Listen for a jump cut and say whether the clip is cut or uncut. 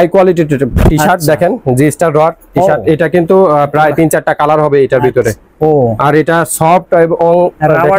uncut